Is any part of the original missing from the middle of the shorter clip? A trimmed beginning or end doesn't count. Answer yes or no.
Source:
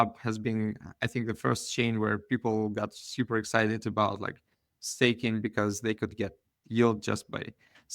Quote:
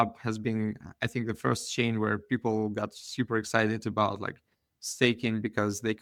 no